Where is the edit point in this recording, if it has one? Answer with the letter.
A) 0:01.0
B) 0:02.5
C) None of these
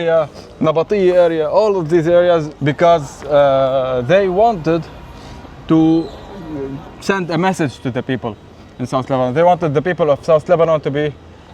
B